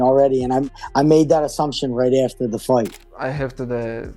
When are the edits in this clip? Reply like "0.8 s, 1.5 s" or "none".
3.0 s

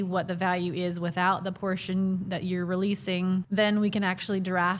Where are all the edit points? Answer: 3.5 s

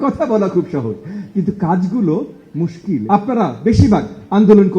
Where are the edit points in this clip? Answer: 3.0 s

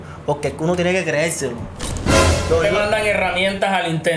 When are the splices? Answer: 2.3 s

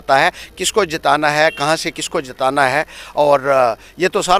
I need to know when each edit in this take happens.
none

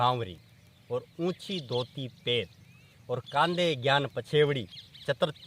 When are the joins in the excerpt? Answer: none

